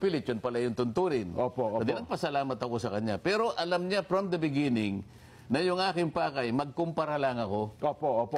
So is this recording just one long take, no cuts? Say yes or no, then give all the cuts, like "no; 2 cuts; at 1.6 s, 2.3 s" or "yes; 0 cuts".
yes; 0 cuts